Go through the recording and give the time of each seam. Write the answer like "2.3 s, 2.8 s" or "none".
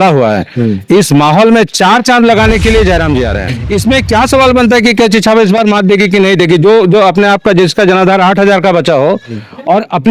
3.5 s